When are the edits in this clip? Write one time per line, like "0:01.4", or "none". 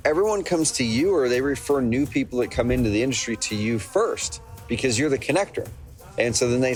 none